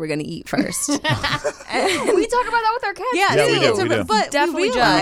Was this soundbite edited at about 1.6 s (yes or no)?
no